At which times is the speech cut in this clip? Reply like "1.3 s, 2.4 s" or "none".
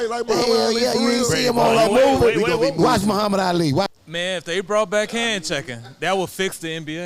3.8 s